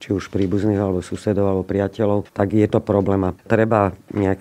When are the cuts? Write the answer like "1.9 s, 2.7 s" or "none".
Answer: 2.3 s, 3.4 s